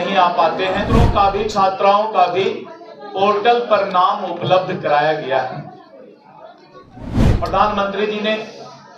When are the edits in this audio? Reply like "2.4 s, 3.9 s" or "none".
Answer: 0.9 s